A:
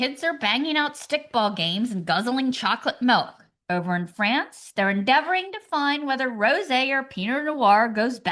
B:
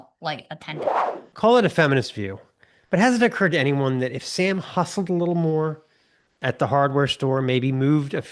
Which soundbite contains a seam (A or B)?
B